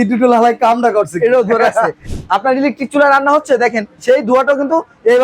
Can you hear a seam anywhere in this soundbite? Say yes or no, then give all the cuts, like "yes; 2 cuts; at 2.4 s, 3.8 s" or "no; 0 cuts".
yes; 1 cut; at 2.0 s